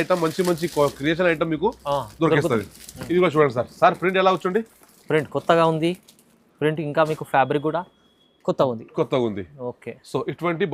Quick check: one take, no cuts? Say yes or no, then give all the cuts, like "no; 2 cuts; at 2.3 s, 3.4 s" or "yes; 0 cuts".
yes; 0 cuts